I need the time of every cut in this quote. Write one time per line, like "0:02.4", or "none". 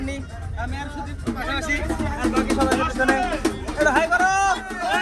none